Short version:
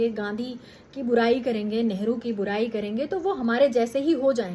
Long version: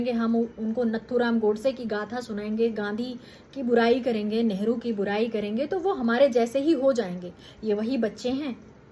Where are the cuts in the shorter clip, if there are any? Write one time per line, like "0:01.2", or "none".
none